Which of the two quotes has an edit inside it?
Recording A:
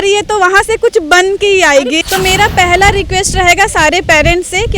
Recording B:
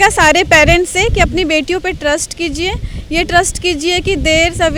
A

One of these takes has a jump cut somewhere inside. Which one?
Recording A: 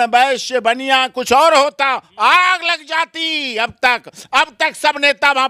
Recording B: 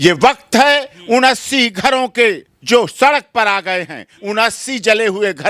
B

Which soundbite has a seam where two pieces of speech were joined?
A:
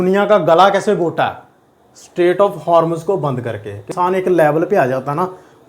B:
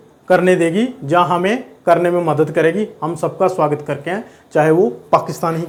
A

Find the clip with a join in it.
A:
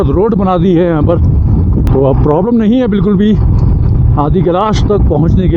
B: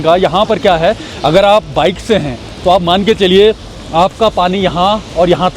A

